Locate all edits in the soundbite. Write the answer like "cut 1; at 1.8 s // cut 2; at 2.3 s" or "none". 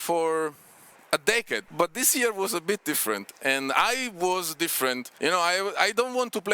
cut 1; at 1.7 s // cut 2; at 5.1 s